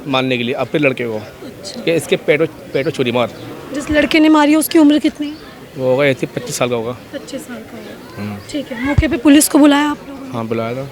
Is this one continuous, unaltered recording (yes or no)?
yes